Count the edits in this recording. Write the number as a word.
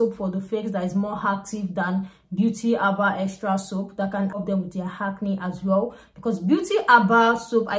one